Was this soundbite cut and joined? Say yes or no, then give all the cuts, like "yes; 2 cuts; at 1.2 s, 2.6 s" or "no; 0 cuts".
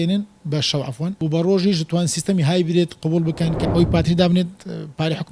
yes; 2 cuts; at 1.1 s, 3.6 s